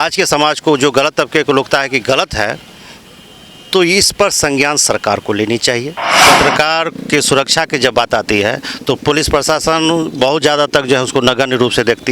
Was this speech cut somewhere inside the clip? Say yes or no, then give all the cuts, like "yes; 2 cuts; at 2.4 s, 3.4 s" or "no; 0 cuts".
yes; 1 cut; at 6.2 s